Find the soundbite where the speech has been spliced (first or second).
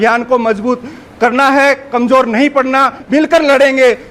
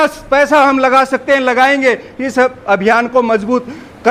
first